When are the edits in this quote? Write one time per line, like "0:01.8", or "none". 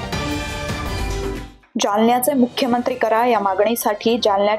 0:01.2